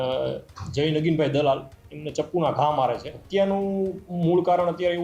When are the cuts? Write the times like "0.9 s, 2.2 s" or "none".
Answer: 3.1 s

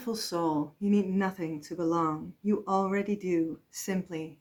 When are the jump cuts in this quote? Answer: none

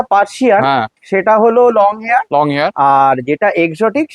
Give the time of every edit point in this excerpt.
none

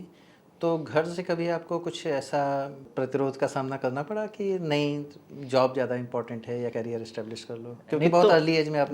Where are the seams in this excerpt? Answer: 2.9 s, 6.7 s

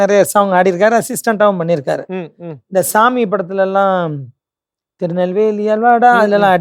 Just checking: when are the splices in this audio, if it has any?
none

